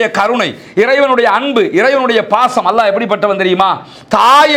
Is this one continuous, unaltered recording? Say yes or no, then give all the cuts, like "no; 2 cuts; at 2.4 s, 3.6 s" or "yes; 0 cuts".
yes; 0 cuts